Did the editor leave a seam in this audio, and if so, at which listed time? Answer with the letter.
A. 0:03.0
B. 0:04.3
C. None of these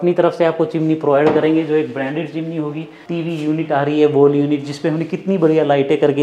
A